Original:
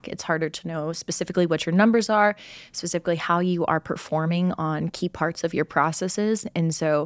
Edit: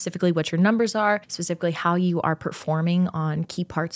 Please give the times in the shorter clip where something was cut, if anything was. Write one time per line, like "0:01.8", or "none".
0:01.4